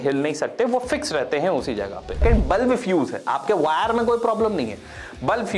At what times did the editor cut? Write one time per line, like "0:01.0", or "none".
0:02.2